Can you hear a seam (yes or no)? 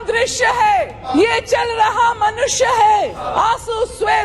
yes